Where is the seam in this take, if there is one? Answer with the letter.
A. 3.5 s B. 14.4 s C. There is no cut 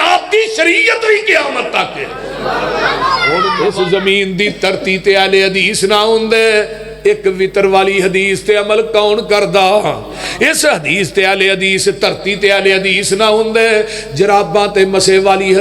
A